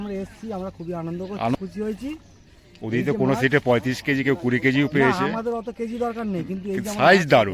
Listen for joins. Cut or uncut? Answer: cut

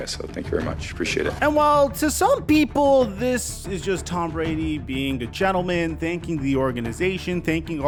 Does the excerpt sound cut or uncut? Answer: uncut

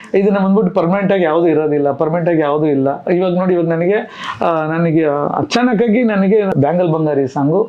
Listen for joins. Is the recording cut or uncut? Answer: cut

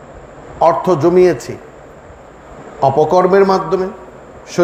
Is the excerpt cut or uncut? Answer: uncut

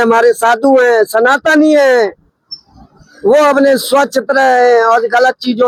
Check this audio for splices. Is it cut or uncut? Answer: uncut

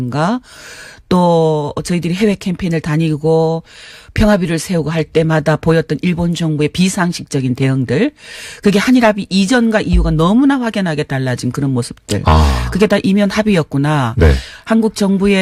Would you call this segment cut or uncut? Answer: uncut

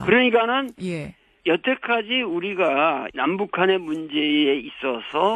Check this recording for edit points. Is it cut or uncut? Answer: uncut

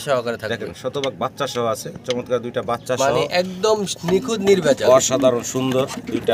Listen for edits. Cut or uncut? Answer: uncut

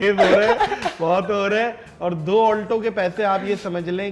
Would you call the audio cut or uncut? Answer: uncut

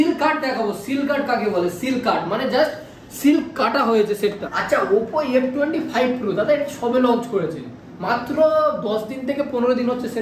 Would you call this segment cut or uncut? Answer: cut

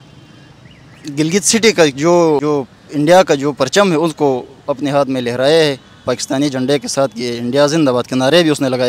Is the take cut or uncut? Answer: uncut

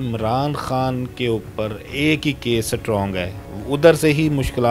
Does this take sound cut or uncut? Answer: uncut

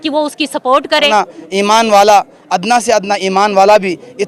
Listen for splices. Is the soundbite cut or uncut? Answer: cut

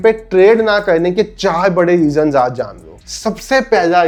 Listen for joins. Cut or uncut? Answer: uncut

